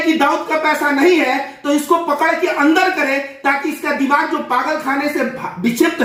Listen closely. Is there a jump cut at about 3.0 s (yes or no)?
no